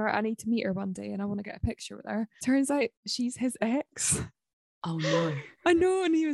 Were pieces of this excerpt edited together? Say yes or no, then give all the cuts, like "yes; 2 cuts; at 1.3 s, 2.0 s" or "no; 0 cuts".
yes; 2 cuts; at 2.3 s, 3.0 s